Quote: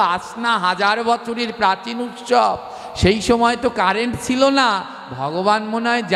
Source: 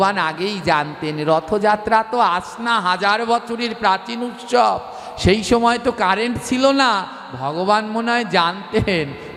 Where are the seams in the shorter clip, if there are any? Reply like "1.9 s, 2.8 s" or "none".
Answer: none